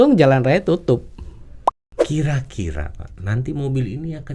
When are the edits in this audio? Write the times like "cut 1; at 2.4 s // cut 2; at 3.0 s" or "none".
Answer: cut 1; at 1.7 s

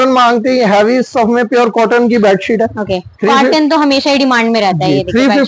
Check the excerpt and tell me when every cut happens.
none

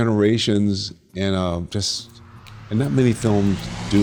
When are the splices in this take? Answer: none

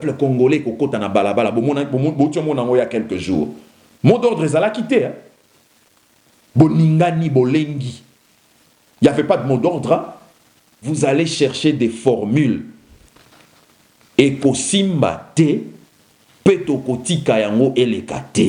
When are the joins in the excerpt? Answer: cut 1; at 11.0 s

